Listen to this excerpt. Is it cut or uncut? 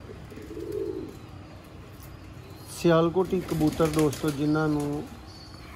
uncut